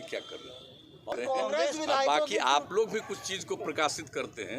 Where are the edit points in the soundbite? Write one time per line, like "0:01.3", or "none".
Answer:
0:01.1